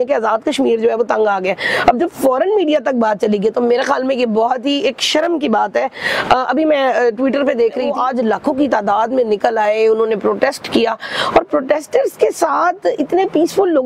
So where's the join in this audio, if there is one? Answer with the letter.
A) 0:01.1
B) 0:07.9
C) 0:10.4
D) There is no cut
B